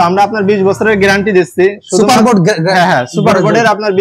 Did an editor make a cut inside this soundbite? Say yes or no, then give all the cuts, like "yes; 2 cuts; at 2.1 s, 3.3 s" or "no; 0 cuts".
no; 0 cuts